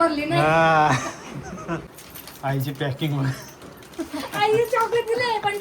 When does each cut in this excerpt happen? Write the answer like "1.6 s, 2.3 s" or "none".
1.9 s